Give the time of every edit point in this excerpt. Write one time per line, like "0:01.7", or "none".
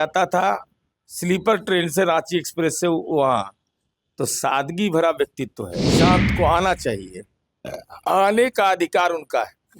0:05.9